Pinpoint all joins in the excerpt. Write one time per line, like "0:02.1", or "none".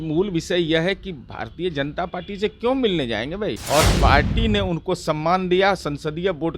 0:03.6